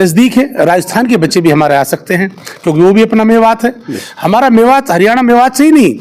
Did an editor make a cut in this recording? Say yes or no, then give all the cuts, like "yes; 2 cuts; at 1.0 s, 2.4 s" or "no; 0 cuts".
no; 0 cuts